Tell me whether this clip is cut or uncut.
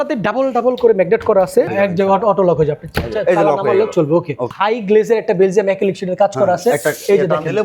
cut